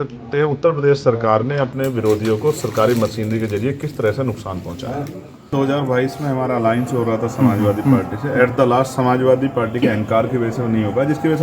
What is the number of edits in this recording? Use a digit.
1